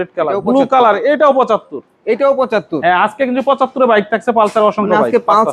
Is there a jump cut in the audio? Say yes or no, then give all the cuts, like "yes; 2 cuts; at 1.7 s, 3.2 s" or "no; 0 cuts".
no; 0 cuts